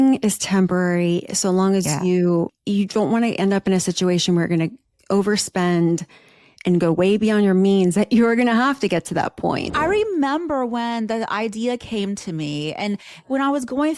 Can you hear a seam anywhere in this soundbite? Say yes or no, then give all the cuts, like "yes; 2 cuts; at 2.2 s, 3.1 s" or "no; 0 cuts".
yes; 2 cuts; at 2.6 s, 9.7 s